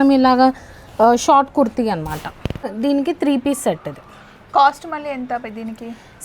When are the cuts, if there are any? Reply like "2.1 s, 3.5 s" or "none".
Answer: 2.7 s